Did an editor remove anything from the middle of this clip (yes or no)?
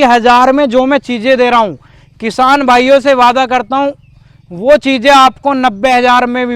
no